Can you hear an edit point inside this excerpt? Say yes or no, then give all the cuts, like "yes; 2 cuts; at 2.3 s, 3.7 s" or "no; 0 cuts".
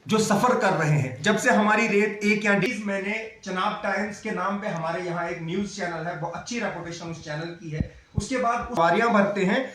yes; 2 cuts; at 2.7 s, 8.8 s